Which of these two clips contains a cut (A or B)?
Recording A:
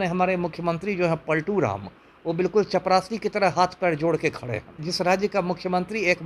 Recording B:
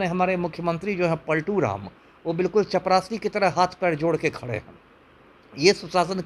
A